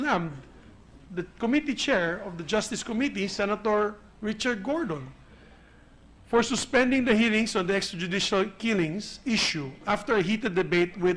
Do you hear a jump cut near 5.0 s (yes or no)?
no